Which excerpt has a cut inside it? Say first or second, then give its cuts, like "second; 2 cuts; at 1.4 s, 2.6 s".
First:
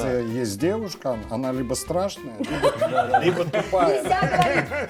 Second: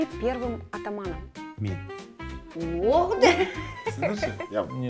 second; 1 cut; at 3.9 s